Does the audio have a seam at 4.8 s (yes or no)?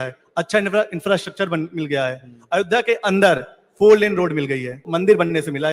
yes